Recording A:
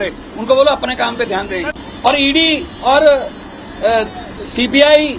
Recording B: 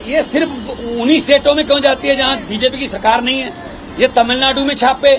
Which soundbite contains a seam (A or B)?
A